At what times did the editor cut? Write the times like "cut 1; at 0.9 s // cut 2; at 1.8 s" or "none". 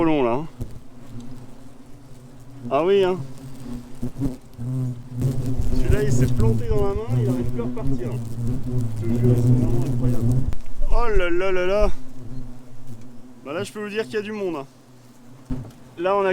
cut 1; at 5.2 s // cut 2; at 10.5 s // cut 3; at 15.5 s